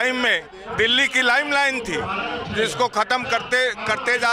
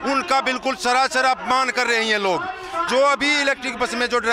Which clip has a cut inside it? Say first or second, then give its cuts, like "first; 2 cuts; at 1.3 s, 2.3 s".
second; 1 cut; at 2.9 s